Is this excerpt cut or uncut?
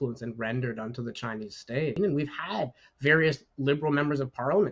cut